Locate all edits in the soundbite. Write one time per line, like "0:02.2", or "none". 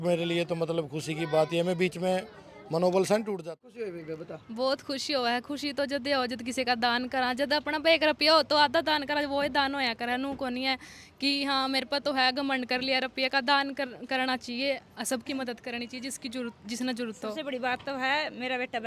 0:03.4